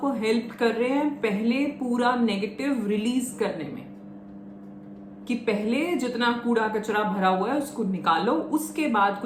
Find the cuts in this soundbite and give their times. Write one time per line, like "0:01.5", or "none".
none